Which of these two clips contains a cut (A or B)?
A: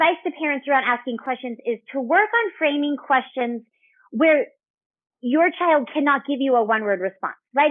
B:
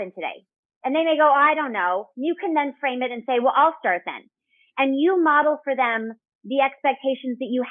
A